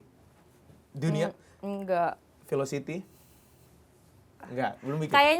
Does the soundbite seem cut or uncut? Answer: uncut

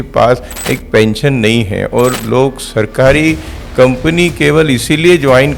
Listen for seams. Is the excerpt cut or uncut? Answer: uncut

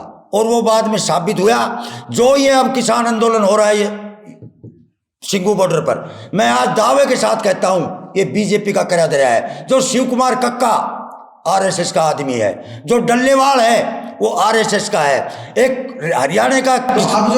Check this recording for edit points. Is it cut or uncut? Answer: uncut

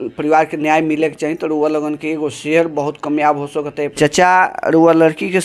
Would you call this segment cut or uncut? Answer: uncut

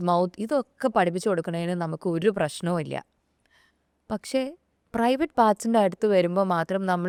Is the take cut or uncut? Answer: uncut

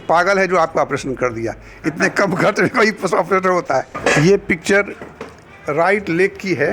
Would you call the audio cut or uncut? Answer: cut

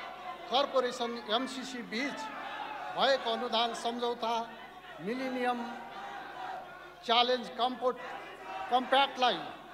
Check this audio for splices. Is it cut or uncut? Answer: uncut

